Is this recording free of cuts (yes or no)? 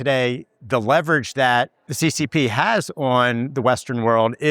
no